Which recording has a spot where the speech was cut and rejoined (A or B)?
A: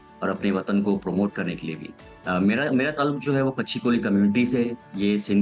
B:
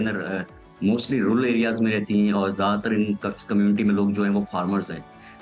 A